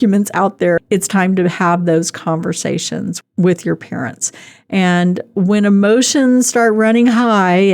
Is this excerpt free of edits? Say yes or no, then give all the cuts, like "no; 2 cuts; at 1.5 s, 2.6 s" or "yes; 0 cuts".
no; 2 cuts; at 0.8 s, 3.2 s